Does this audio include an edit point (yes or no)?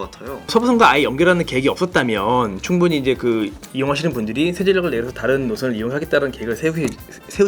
no